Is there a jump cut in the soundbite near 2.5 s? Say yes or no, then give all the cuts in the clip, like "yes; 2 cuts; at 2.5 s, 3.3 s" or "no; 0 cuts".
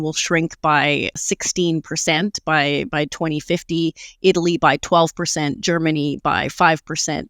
no; 1 cut; at 1.2 s